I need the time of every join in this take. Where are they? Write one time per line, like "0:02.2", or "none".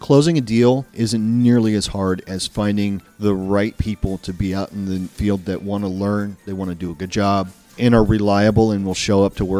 0:00.9
0:03.1
0:05.1
0:07.7